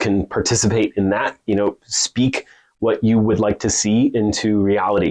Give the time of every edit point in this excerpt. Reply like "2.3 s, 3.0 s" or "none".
none